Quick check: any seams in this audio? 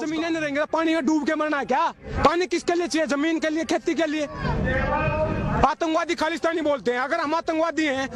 no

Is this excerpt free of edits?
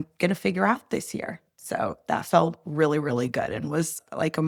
yes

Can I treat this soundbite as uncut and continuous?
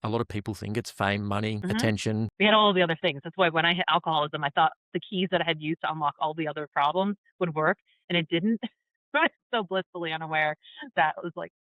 no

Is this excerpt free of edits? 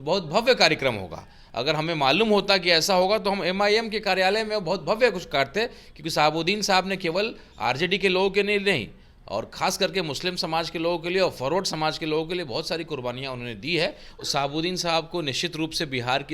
no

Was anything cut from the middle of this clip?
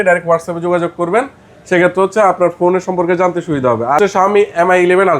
yes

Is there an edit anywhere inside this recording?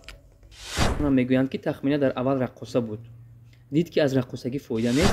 yes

